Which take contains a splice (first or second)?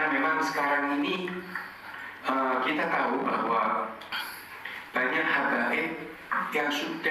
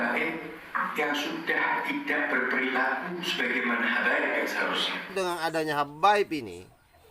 second